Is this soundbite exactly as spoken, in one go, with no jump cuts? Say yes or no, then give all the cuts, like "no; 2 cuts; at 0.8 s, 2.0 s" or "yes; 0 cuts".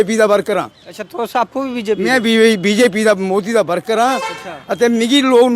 yes; 0 cuts